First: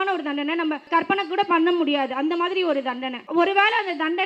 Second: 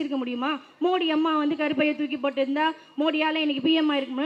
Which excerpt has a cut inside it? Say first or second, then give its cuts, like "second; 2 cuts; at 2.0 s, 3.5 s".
first; 2 cuts; at 0.9 s, 3.1 s